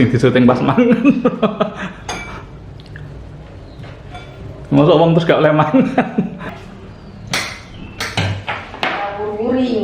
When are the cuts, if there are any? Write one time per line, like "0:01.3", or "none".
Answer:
0:06.5